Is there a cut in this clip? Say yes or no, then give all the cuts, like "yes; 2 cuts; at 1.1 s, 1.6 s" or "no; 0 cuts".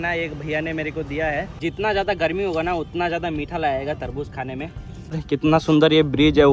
yes; 2 cuts; at 1.5 s, 5.2 s